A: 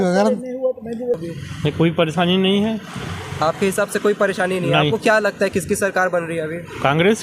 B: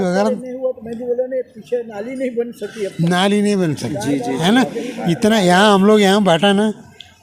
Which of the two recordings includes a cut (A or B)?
A